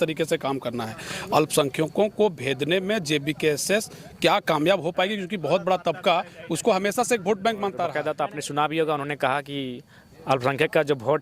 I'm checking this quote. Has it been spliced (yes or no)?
yes